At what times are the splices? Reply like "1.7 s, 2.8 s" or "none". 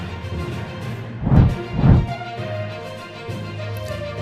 1.1 s